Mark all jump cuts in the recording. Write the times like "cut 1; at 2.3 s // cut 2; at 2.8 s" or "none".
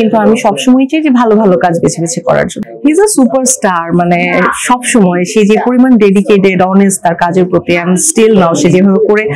cut 1; at 2.6 s